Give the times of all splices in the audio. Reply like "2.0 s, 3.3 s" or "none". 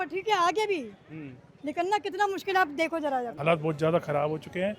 3.3 s